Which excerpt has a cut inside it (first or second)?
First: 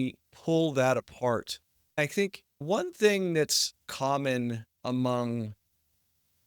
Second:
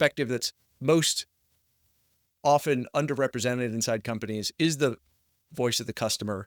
first